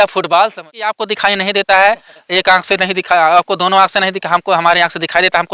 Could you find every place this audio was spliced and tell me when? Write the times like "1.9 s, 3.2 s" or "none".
1.0 s